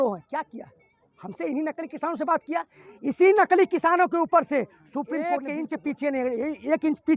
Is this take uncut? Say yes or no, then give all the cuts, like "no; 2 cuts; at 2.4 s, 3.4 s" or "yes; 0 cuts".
no; 1 cut; at 5.2 s